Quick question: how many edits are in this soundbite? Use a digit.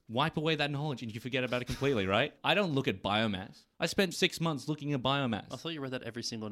2